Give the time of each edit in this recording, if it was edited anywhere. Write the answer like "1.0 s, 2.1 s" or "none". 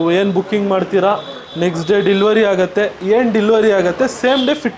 none